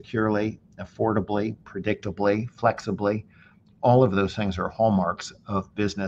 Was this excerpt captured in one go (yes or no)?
yes